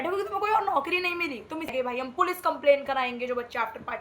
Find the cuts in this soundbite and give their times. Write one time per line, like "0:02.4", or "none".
0:01.7